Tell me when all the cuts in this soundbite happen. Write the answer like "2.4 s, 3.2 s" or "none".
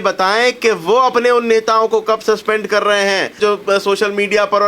3.4 s